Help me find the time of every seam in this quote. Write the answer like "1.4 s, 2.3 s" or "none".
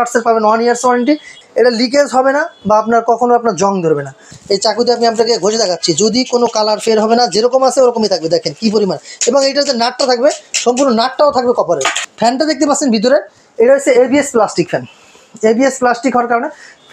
1.4 s, 4.3 s, 12.0 s

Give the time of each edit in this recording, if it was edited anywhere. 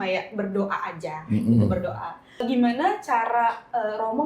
2.5 s

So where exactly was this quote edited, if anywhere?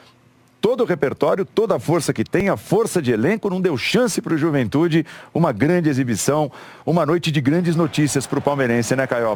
none

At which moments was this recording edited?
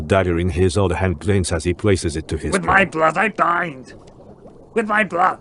2.4 s

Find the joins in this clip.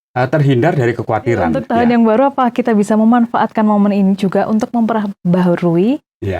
1.6 s

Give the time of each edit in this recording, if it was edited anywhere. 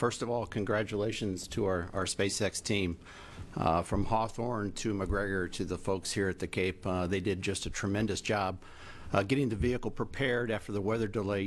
1.6 s

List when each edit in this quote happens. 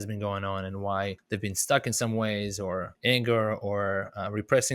1.2 s, 2.9 s

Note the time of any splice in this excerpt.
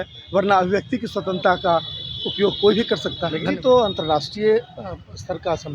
3.4 s

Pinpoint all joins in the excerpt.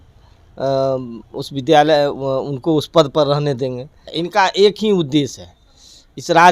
4.1 s

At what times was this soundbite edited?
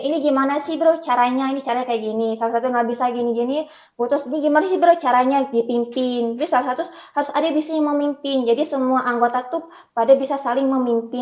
none

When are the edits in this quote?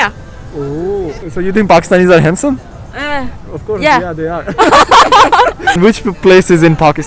1.2 s, 5.8 s

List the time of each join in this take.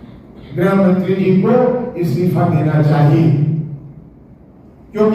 none

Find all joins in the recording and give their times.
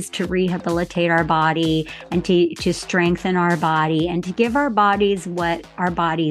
none

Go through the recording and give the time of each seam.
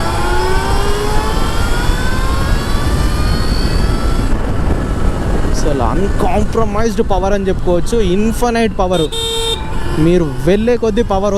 none

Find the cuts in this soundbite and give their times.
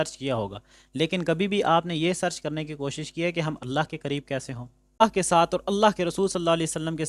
5.0 s

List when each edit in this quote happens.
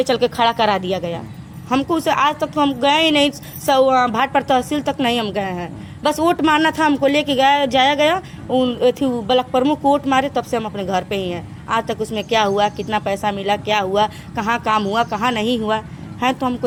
none

